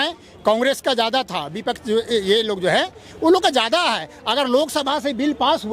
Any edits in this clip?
no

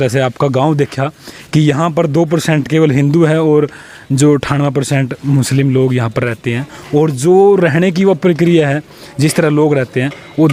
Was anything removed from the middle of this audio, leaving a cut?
no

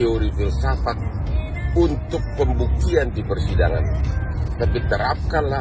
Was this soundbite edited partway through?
no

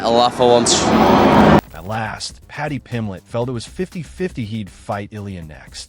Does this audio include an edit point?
no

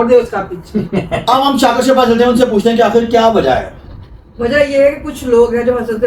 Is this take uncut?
yes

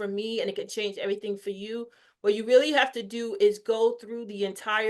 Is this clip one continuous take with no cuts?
yes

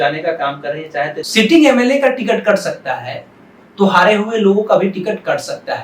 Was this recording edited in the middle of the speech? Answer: yes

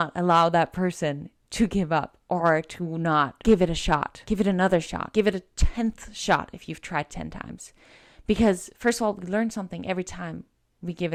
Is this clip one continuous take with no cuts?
yes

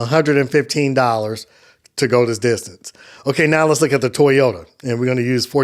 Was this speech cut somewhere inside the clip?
no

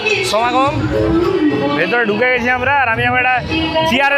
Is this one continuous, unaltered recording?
yes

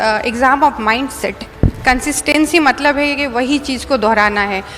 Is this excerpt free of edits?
no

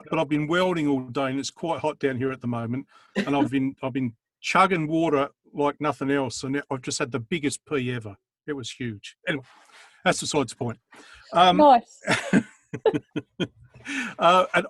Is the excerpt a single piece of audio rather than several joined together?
yes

